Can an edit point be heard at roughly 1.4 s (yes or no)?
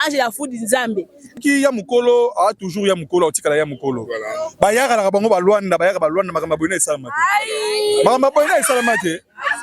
yes